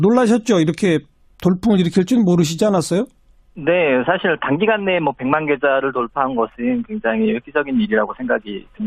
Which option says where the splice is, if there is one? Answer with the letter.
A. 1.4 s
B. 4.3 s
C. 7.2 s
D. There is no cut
D